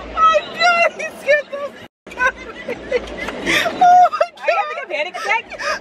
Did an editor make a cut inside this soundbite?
no; 0 cuts

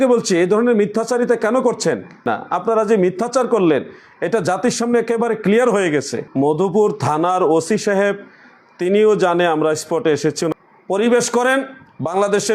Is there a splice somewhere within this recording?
yes; 3 cuts; at 2.2 s, 6.2 s, 10.6 s

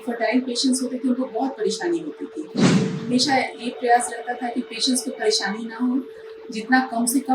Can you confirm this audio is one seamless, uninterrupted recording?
no; 1 cut; at 2.6 s

